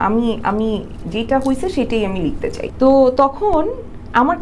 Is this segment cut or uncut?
cut